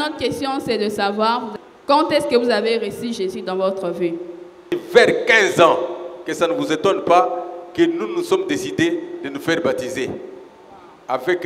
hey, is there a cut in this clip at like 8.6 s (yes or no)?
no